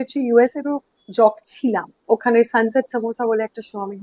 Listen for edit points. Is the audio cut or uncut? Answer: cut